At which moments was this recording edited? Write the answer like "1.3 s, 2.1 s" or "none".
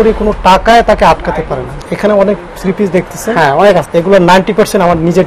1.7 s, 3.9 s